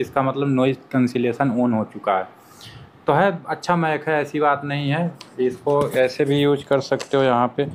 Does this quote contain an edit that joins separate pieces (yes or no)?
no